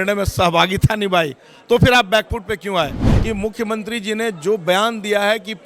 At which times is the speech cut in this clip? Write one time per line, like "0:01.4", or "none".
0:03.1